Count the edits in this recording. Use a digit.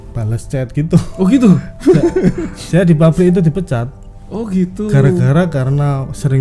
0